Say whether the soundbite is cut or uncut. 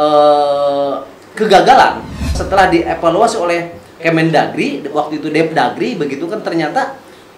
cut